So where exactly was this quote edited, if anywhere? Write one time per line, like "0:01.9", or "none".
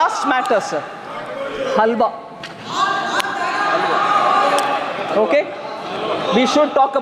none